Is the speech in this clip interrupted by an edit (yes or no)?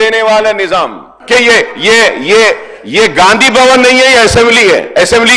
yes